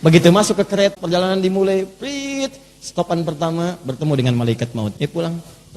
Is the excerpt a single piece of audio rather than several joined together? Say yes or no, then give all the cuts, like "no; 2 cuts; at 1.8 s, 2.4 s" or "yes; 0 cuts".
no; 2 cuts; at 0.9 s, 5.0 s